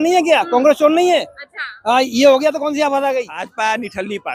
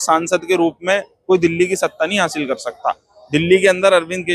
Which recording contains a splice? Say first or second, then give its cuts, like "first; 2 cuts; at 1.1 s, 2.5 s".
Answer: first; 1 cut; at 3.4 s